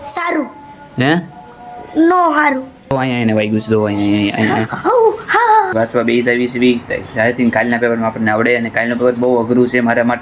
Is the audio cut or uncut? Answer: cut